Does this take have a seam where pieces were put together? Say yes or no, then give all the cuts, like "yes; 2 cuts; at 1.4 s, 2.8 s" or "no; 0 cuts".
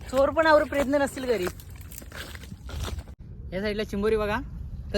yes; 1 cut; at 3.1 s